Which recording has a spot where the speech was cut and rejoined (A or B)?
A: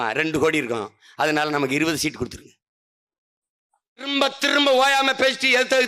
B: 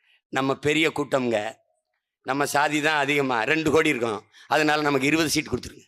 A